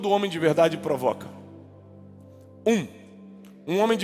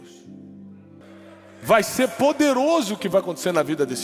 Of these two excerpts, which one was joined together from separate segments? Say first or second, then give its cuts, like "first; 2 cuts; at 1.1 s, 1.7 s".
second; 1 cut; at 1.0 s